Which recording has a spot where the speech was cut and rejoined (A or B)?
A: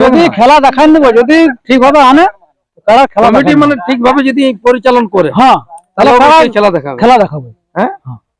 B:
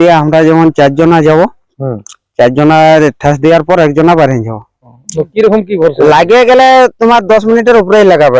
B